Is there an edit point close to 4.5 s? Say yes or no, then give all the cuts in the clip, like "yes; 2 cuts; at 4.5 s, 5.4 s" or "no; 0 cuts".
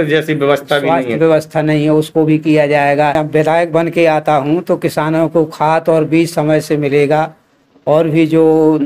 no; 1 cut; at 3.2 s